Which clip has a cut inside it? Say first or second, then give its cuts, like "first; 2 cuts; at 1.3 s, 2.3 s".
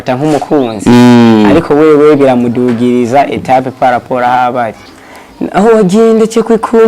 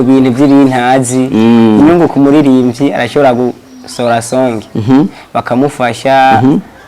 first; 1 cut; at 4.8 s